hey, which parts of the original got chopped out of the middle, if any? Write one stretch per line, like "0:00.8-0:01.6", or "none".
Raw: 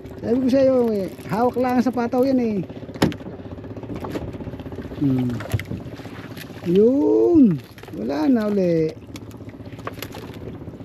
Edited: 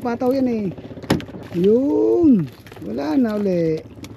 0:03.3-0:06.5

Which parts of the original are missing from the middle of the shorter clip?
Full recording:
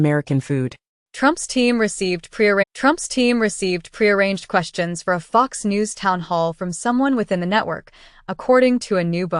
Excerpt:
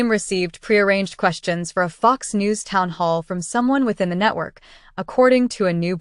0:02.6-0:04.2

